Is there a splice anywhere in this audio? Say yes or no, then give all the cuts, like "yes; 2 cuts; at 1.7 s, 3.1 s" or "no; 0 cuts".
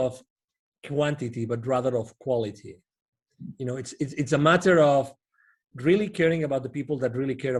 no; 0 cuts